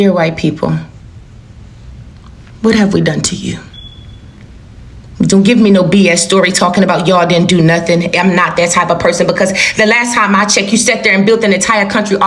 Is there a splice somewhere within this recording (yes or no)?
no